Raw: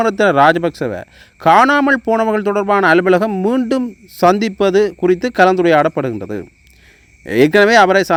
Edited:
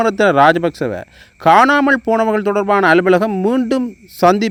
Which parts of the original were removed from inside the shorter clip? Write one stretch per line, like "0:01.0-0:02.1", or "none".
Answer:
none